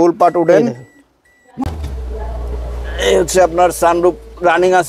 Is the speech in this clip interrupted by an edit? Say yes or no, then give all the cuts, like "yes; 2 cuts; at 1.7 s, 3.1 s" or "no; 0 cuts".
yes; 1 cut; at 1.6 s